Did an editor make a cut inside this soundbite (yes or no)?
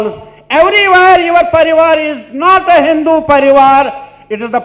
no